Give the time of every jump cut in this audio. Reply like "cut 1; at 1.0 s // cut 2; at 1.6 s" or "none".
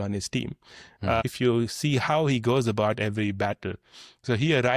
cut 1; at 1.2 s